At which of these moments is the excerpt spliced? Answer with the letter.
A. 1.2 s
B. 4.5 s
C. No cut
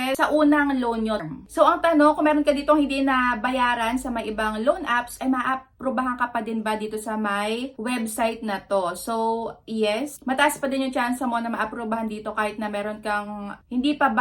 A